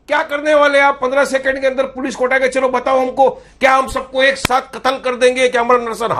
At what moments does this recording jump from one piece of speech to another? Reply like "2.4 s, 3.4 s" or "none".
none